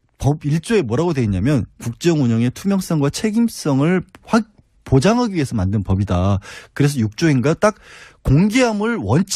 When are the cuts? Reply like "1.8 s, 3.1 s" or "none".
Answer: 5.9 s